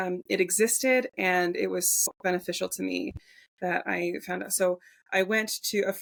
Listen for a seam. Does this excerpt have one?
no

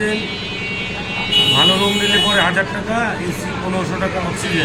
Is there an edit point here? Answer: no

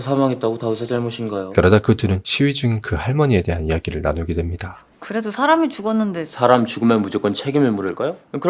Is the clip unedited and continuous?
yes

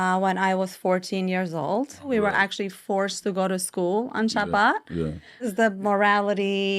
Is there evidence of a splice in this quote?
yes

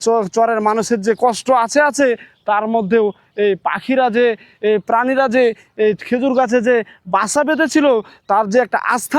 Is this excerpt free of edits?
yes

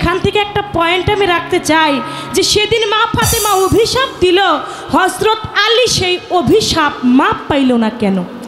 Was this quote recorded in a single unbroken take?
yes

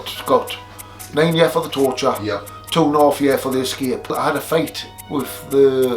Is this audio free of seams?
no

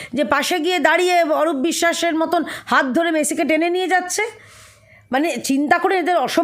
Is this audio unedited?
yes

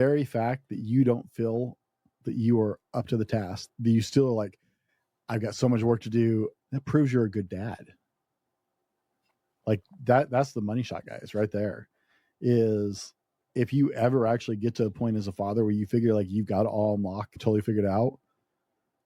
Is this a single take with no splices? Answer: no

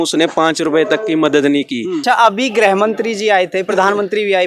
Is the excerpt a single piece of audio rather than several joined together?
no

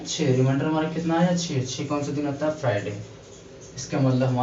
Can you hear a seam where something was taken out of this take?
no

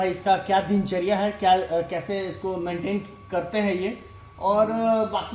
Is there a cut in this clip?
no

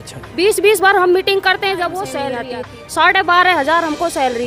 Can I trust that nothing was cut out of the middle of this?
no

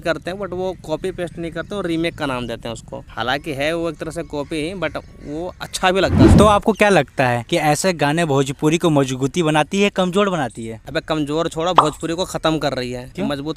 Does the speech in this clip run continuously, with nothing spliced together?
no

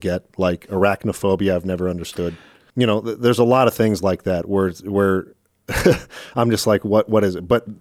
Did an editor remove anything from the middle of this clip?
yes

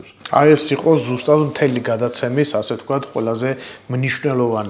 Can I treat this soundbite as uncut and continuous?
yes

